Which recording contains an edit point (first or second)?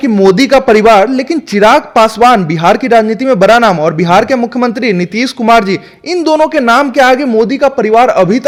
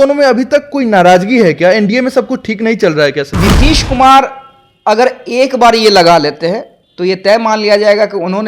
second